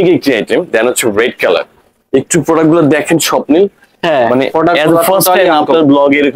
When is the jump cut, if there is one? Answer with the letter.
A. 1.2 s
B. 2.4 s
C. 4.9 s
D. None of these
D